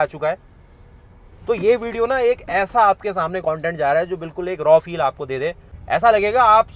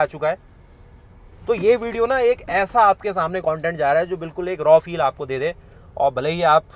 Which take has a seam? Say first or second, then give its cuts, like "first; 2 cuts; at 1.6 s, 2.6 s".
first; 1 cut; at 5.7 s